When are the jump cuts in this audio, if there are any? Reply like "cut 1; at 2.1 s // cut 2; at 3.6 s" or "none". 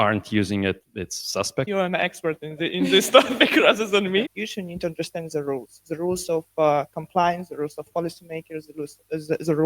cut 1; at 1.7 s // cut 2; at 4.4 s